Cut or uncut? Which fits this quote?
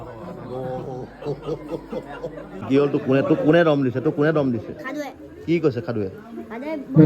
cut